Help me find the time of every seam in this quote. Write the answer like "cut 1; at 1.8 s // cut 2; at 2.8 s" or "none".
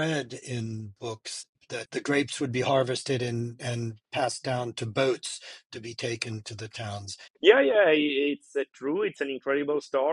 cut 1; at 1.6 s // cut 2; at 7.2 s